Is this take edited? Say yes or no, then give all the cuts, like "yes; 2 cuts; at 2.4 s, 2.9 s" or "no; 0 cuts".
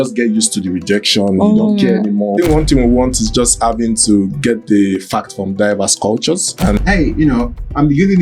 yes; 2 cuts; at 2.3 s, 6.8 s